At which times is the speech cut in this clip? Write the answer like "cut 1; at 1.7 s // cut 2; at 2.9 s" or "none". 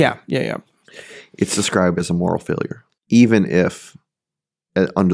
cut 1; at 2.8 s